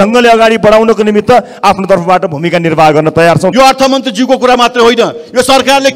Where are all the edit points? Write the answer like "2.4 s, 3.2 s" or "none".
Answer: 3.5 s